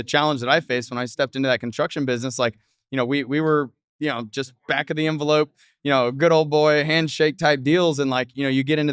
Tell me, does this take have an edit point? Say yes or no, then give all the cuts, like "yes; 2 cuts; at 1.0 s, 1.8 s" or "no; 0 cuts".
no; 0 cuts